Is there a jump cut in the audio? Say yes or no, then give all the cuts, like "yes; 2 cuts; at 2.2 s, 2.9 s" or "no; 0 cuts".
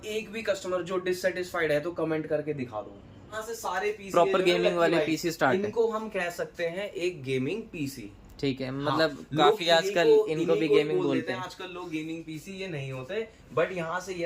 yes; 1 cut; at 3.4 s